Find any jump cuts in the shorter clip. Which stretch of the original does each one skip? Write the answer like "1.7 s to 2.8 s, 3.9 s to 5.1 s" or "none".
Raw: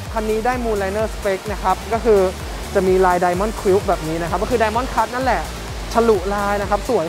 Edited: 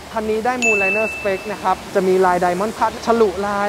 1.8 s to 2.6 s, 3.5 s to 5.6 s